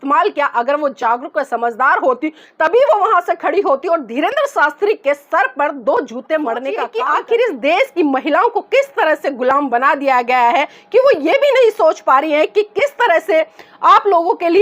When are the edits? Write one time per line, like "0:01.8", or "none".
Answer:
0:06.9